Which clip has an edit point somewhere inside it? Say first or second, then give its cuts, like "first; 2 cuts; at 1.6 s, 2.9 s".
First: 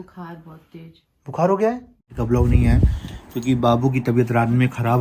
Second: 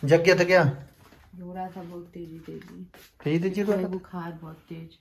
first; 1 cut; at 2.1 s